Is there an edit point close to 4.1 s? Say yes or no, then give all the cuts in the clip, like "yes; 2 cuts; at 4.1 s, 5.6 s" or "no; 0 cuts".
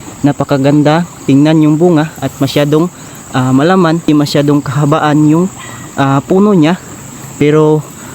yes; 1 cut; at 4.1 s